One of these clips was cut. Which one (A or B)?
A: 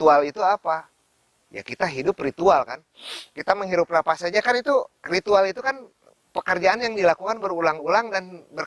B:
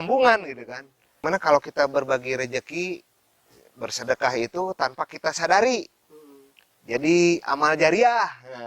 B